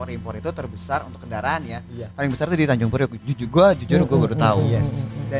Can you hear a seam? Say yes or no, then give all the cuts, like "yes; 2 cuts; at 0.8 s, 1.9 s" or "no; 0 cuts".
no; 0 cuts